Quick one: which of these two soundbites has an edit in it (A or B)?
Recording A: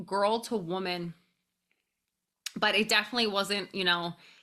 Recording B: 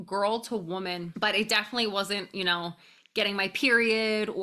B